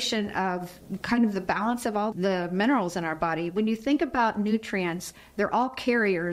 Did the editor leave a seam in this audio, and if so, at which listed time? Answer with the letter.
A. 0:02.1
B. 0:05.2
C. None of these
A